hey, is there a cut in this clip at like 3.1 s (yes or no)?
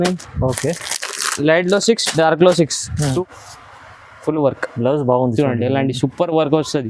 yes